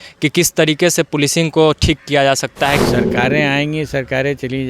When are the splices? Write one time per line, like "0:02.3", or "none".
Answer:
0:02.9